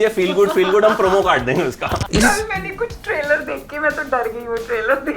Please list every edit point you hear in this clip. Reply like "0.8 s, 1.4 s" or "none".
2.0 s